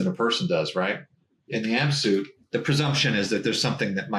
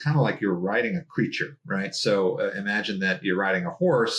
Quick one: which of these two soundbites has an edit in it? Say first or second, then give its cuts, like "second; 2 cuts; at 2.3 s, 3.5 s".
first; 2 cuts; at 1.2 s, 2.4 s